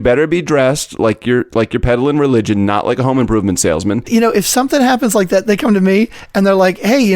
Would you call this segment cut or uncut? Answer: cut